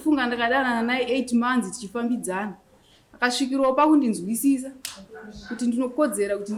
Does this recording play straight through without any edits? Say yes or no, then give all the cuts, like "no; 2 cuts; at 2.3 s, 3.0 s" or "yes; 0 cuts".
yes; 0 cuts